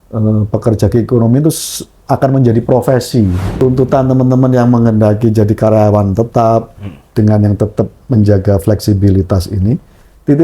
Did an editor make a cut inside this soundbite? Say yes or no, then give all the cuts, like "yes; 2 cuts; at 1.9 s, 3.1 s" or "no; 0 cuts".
yes; 1 cut; at 3.4 s